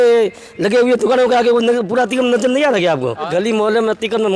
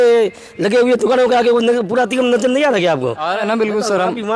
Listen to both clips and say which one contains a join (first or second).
first